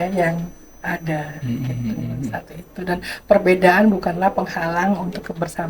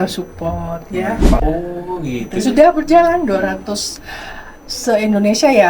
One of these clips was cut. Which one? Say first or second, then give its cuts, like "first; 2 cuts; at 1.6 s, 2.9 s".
second; 1 cut; at 1.4 s